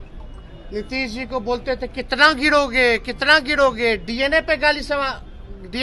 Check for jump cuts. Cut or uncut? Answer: uncut